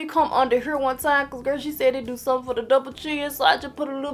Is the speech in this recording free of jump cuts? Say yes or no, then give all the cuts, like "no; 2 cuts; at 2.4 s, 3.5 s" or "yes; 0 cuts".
yes; 0 cuts